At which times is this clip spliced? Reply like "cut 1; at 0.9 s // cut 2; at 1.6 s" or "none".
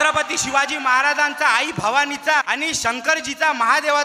cut 1; at 2.4 s